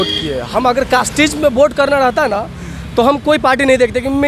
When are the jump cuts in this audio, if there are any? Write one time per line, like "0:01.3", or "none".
none